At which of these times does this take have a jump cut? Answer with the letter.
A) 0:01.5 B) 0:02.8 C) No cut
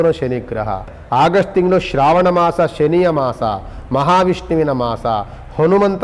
A